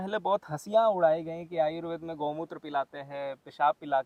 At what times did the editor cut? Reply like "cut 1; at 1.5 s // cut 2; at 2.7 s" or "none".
none